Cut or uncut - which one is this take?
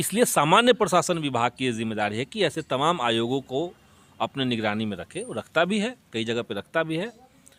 uncut